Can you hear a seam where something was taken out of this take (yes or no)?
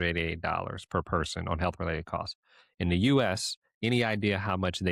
no